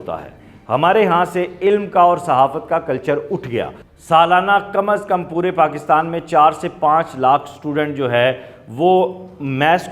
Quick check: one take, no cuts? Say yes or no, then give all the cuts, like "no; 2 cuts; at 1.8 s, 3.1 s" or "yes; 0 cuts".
no; 1 cut; at 3.8 s